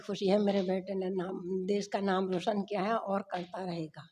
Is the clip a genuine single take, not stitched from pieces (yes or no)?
yes